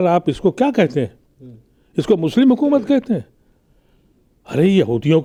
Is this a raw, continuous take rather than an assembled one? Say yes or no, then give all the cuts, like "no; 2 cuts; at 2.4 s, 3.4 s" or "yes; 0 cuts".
yes; 0 cuts